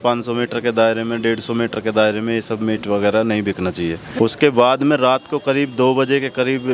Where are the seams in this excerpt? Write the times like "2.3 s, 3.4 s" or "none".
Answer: 4.0 s